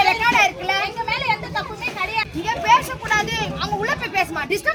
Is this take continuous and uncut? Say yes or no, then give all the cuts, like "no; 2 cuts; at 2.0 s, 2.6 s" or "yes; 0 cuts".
yes; 0 cuts